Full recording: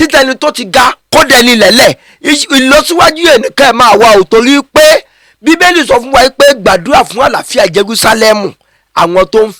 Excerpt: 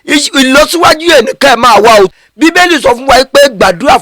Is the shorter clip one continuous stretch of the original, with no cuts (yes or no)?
no